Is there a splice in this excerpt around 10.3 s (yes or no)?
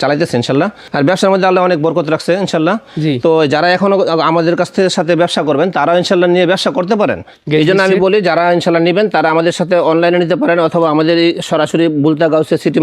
no